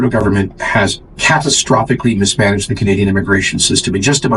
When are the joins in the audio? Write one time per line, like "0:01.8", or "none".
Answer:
none